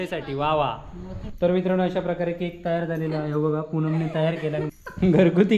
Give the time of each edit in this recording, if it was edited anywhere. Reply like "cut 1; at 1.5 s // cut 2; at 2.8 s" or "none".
cut 1; at 1.3 s // cut 2; at 4.7 s